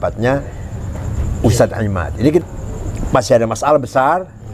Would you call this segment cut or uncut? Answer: cut